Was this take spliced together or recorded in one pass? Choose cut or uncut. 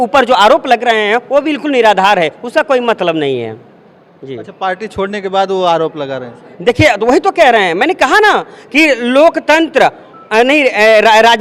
uncut